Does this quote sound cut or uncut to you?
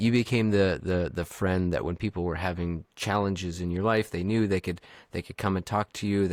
uncut